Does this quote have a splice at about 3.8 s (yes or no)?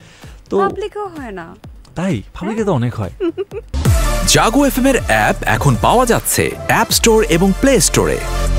yes